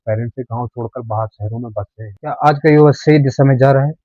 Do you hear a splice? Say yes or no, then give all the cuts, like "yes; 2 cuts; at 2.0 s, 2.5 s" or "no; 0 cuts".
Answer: yes; 1 cut; at 2.0 s